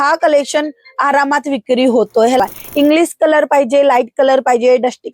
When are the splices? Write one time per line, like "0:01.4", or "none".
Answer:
0:02.4